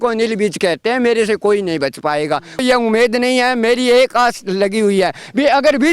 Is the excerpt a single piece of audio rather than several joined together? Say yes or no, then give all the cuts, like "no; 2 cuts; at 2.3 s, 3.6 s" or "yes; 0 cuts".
no; 1 cut; at 2.6 s